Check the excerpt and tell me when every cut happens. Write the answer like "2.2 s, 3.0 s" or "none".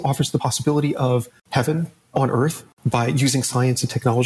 1.4 s, 2.7 s